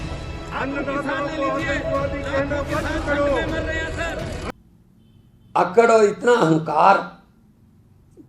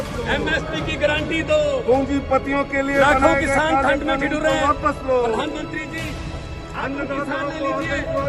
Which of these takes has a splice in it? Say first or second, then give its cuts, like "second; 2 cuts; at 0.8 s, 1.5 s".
first; 1 cut; at 4.5 s